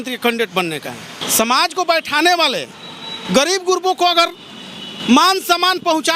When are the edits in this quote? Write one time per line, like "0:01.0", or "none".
0:01.2